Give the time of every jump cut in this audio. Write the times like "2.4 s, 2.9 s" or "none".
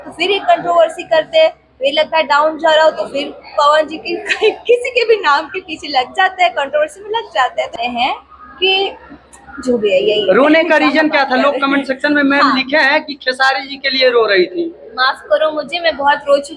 7.8 s